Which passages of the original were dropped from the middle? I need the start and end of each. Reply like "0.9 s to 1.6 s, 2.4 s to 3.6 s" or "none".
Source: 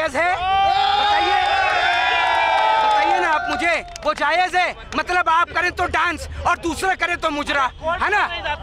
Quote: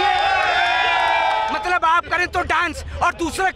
2.8 s to 4.9 s